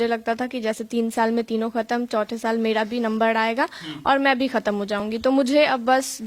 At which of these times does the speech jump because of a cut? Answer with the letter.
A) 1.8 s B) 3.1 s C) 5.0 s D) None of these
D